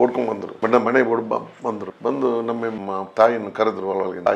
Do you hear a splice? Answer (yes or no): yes